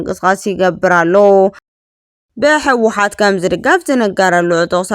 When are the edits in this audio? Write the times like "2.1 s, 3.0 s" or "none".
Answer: 1.7 s